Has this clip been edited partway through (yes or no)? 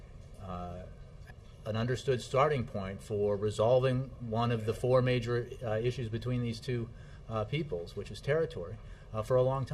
no